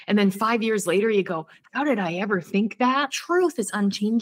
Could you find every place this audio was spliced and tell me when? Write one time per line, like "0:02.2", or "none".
0:03.2